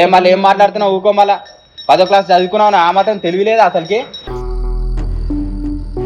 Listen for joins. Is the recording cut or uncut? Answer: uncut